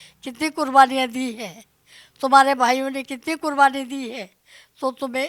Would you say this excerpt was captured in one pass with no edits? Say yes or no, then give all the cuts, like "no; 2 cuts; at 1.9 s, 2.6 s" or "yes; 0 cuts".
yes; 0 cuts